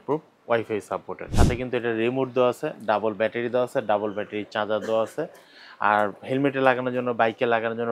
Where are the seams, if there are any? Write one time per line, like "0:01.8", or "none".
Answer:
0:01.2